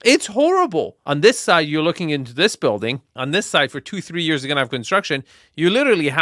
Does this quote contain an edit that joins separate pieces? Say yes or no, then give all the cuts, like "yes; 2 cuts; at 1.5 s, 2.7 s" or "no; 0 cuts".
yes; 2 cuts; at 1.0 s, 3.1 s